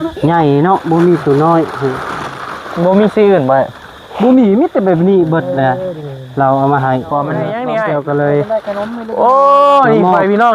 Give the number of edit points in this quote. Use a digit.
1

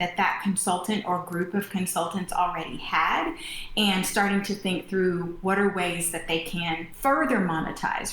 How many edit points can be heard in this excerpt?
1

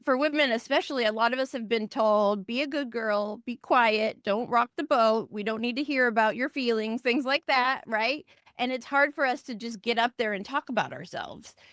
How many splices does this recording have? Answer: 0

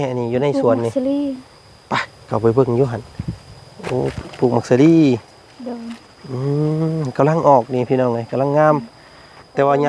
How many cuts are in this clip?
0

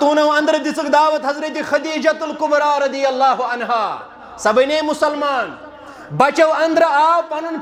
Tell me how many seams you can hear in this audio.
0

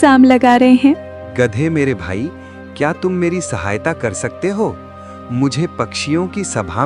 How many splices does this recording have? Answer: 1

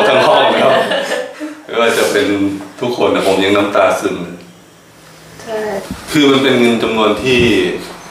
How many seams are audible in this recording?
1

